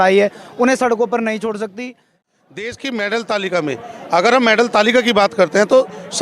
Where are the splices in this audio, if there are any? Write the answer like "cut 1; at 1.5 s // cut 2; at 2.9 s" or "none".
cut 1; at 2.2 s